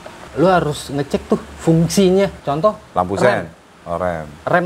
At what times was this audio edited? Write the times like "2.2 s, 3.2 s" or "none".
none